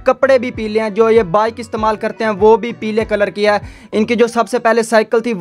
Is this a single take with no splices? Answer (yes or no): yes